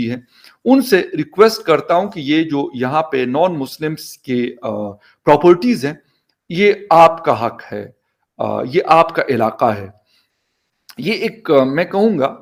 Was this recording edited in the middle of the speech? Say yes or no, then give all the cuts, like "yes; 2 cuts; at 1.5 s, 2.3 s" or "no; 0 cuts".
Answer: no; 0 cuts